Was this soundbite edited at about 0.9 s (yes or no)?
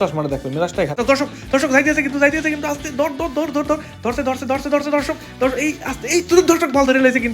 yes